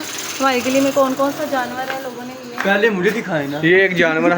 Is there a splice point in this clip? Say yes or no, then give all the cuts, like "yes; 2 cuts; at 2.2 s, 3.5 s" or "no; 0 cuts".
no; 0 cuts